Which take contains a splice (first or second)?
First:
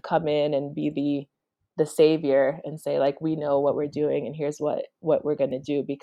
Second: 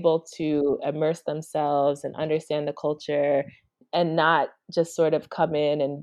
second